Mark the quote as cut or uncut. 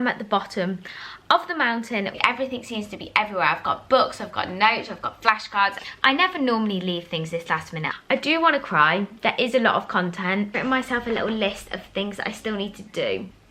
cut